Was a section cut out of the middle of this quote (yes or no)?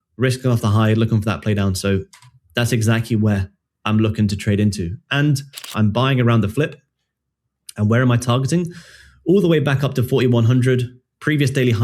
yes